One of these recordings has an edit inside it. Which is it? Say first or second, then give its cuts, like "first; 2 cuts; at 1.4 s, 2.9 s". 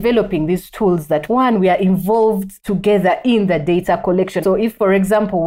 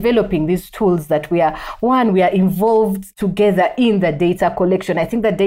first; 2 cuts; at 1.2 s, 4.6 s